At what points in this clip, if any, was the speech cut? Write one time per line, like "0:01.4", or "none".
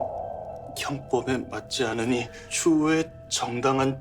0:02.4